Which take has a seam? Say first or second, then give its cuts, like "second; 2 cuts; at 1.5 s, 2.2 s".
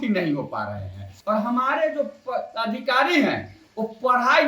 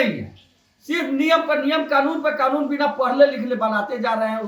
first; 1 cut; at 1.1 s